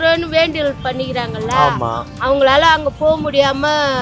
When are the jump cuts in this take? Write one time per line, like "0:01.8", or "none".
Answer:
none